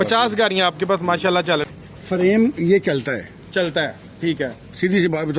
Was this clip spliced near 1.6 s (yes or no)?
yes